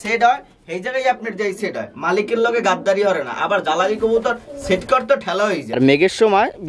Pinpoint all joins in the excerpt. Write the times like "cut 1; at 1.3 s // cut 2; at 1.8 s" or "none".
cut 1; at 5.8 s